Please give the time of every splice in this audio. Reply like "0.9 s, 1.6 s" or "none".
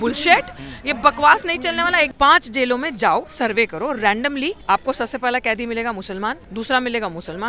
2.1 s, 4.6 s, 6.4 s